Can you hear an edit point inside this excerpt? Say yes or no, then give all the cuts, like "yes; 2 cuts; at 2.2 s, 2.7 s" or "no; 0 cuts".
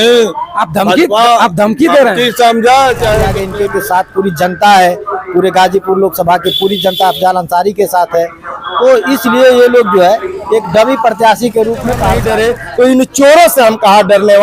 yes; 2 cuts; at 3.4 s, 12.2 s